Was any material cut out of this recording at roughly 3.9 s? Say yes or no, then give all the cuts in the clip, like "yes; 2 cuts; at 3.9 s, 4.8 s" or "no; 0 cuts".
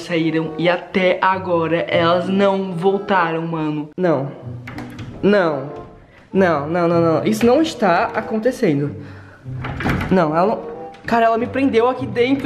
yes; 1 cut; at 3.9 s